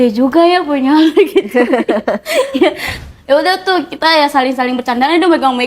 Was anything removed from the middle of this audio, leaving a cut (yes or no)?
yes